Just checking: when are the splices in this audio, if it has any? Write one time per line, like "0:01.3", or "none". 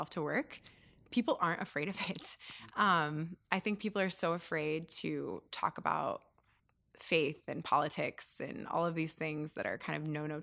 none